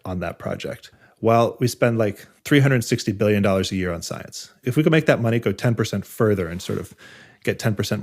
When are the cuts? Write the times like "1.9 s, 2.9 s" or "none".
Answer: 1.0 s, 2.3 s